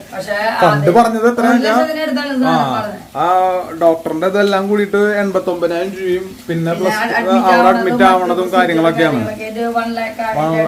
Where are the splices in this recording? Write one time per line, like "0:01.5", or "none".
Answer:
none